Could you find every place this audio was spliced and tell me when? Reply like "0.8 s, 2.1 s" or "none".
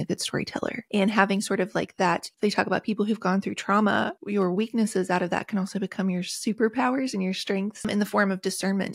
0.8 s, 2.3 s, 4.2 s, 7.9 s